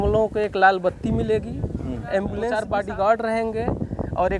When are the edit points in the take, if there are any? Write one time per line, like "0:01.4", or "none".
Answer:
0:02.5